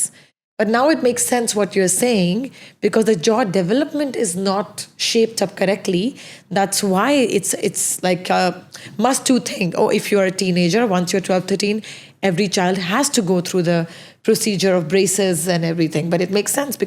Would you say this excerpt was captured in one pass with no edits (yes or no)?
yes